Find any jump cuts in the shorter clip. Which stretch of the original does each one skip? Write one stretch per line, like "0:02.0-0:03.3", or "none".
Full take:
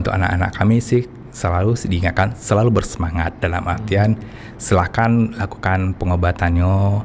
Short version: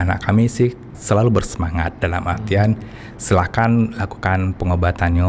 0:01.3-0:02.4